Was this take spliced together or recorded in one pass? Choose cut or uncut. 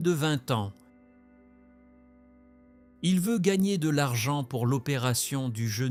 uncut